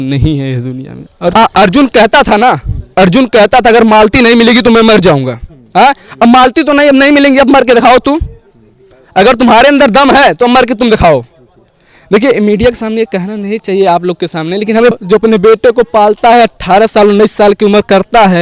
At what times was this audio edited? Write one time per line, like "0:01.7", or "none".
0:01.3
0:14.9